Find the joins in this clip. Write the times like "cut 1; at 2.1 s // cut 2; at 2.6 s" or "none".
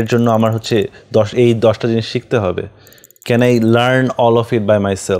none